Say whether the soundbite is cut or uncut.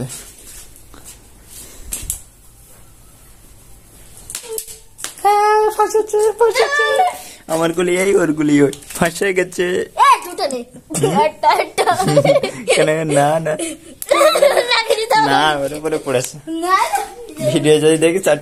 uncut